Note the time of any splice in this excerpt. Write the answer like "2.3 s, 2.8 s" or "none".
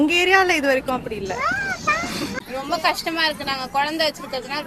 none